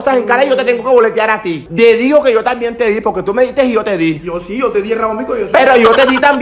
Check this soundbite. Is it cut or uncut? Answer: uncut